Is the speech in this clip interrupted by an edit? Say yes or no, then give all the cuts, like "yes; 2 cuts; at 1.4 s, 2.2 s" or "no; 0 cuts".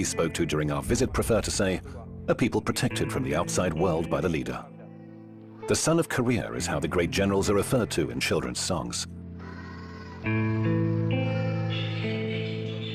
no; 0 cuts